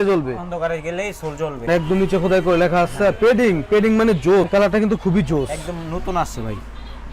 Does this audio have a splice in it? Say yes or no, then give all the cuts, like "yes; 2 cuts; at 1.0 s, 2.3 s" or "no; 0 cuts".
yes; 2 cuts; at 1.6 s, 4.4 s